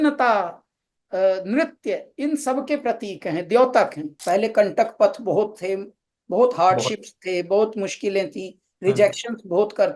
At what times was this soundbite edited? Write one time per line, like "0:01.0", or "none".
0:04.1